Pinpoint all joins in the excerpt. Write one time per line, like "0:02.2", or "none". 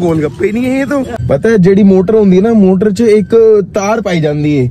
0:01.2